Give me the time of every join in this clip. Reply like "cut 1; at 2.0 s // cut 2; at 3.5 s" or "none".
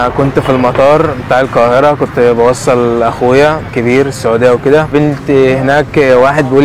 cut 1; at 3.7 s // cut 2; at 4.9 s